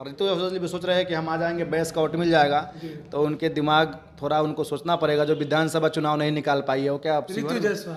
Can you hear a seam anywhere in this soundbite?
no; 0 cuts

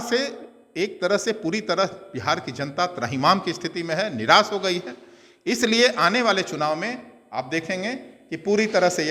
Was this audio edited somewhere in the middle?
no; 0 cuts

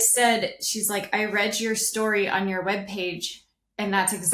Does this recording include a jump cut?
no; 0 cuts

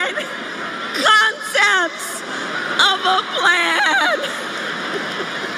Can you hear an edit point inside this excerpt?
no; 0 cuts

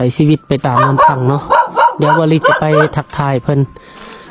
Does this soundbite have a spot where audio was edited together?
no; 0 cuts

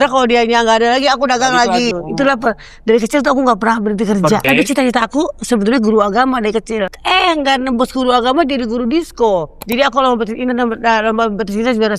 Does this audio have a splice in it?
yes; 4 cuts; at 1.9 s, 4.4 s, 7.0 s, 9.6 s

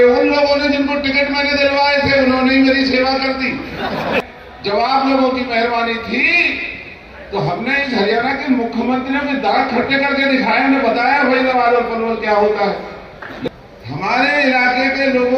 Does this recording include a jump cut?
yes; 2 cuts; at 4.2 s, 13.5 s

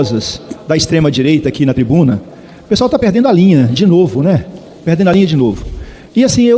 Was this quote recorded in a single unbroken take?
yes; 0 cuts

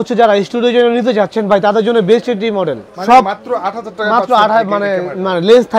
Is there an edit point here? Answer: no; 0 cuts

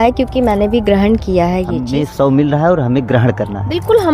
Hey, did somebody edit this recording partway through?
yes; 1 cut; at 1.9 s

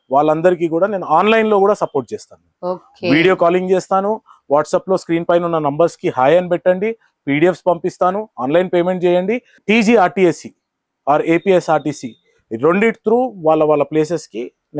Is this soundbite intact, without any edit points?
yes; 0 cuts

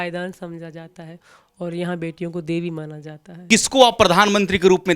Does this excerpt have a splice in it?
yes; 1 cut; at 3.5 s

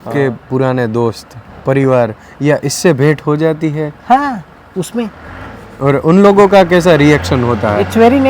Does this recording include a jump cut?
no; 0 cuts

